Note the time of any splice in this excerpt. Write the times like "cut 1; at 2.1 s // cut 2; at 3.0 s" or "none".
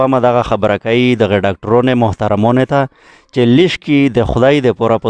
none